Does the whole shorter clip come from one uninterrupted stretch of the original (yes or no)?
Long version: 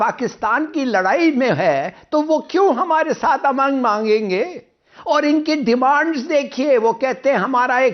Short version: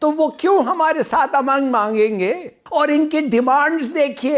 no